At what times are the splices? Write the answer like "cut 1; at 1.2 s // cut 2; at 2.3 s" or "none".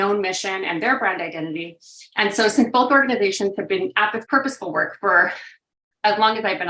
cut 1; at 4.2 s

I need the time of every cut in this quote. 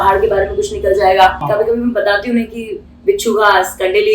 cut 1; at 1.4 s

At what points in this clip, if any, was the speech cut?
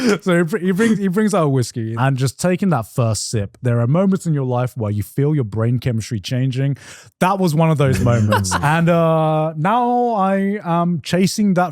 cut 1; at 1.9 s // cut 2; at 3.5 s // cut 3; at 8.6 s

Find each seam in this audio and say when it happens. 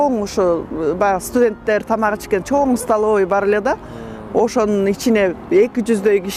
none

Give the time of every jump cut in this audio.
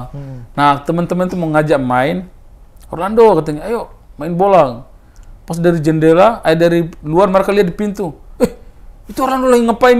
none

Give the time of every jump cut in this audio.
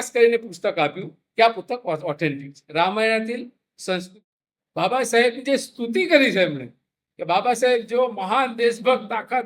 cut 1; at 4.1 s

